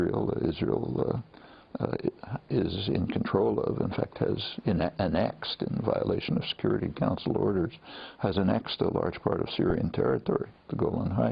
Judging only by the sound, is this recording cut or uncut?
uncut